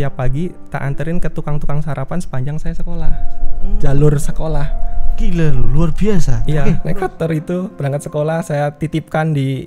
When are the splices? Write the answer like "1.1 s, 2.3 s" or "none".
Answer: 6.8 s